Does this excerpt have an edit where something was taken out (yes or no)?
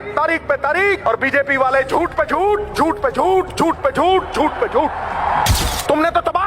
yes